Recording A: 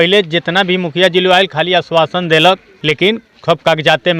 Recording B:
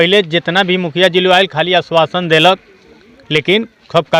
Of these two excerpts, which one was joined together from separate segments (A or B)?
A